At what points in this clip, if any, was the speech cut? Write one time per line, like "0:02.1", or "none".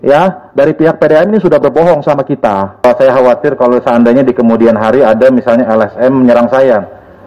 0:02.9